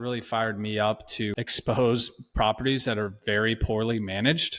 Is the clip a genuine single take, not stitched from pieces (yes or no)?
no